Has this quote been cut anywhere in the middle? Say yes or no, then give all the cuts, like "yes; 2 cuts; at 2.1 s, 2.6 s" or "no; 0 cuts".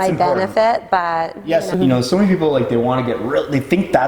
yes; 1 cut; at 1.7 s